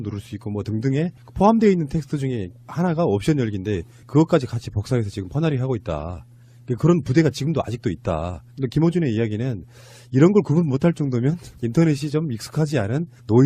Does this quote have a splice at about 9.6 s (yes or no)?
no